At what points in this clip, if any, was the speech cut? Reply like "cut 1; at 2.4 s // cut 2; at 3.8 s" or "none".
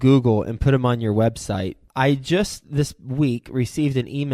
cut 1; at 1.8 s